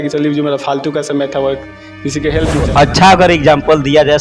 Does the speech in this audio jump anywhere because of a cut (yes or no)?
yes